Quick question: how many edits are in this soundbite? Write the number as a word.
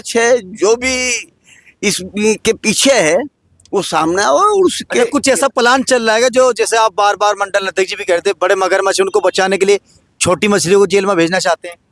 zero